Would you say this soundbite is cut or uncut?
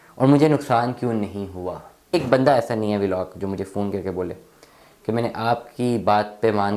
cut